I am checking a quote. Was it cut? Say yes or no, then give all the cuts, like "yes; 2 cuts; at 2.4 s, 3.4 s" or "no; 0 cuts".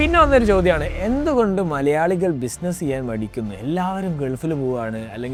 no; 0 cuts